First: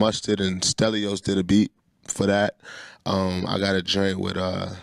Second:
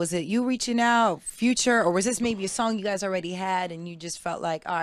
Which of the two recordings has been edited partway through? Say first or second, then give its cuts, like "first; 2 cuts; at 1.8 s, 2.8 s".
first; 1 cut; at 1.8 s